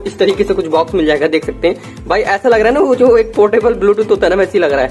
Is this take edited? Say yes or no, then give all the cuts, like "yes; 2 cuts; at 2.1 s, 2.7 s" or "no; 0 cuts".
no; 0 cuts